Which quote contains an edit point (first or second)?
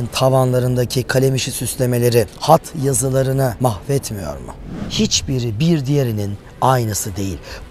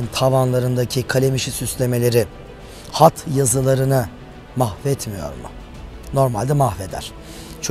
first